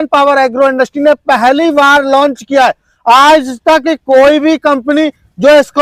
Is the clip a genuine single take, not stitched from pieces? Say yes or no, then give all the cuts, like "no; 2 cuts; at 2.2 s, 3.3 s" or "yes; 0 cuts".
yes; 0 cuts